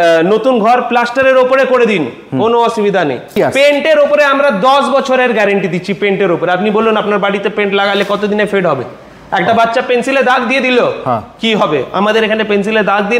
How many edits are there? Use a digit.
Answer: 1